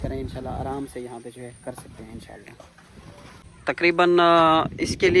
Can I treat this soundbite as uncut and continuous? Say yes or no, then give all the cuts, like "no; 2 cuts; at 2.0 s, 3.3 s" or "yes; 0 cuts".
yes; 0 cuts